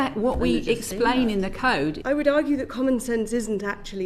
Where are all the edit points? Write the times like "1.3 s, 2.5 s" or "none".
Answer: 2.0 s